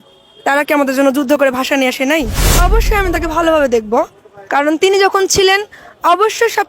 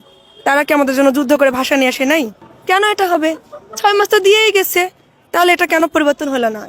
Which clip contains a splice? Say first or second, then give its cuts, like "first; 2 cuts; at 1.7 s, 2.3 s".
first; 1 cut; at 2.4 s